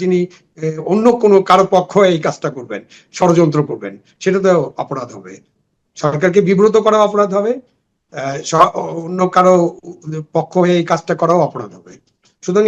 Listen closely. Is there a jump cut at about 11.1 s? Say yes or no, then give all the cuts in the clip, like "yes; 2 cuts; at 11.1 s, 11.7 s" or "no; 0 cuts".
no; 0 cuts